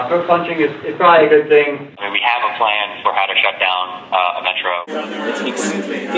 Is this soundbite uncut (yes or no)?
no